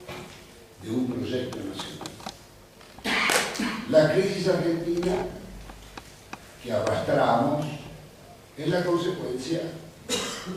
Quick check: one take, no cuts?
no; 1 cut; at 1.9 s

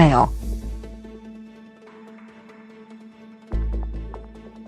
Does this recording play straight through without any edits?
no; 1 cut; at 3.1 s

